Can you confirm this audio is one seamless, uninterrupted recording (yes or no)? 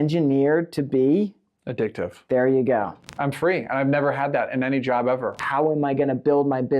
no